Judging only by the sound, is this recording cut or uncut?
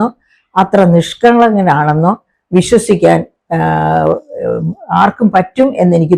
uncut